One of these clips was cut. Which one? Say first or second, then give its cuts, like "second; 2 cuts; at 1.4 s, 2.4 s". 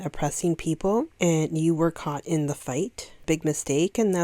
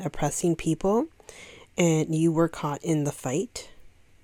first; 2 cuts; at 1.1 s, 3.2 s